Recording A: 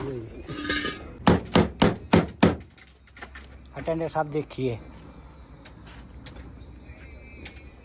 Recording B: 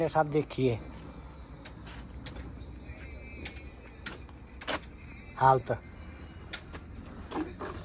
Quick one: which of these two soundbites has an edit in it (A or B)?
A